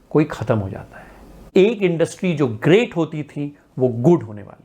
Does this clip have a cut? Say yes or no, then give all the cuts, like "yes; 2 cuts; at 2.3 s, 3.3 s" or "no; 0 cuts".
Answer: yes; 1 cut; at 1.5 s